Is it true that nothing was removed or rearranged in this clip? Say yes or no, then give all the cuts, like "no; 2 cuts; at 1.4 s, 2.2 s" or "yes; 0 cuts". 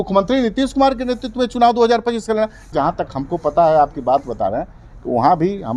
no; 1 cut; at 2.6 s